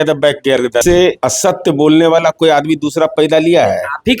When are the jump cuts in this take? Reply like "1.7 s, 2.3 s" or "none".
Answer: 0.9 s